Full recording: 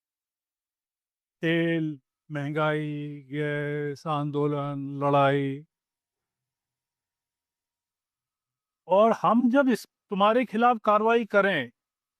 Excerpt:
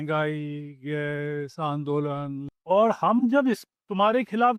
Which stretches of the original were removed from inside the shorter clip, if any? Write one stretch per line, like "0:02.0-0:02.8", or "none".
0:04.9-0:08.7